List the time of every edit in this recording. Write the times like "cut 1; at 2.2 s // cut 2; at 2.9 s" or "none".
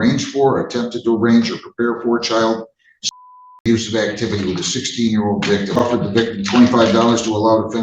cut 1; at 5.8 s